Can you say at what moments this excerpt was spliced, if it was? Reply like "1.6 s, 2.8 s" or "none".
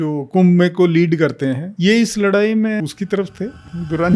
1.7 s, 2.8 s